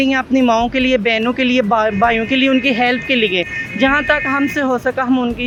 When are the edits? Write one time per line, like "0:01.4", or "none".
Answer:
none